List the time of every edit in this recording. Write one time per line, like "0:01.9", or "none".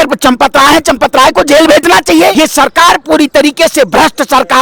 0:02.3